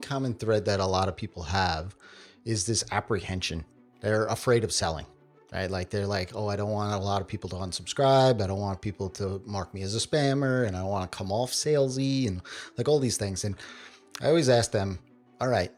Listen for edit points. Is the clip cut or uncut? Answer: uncut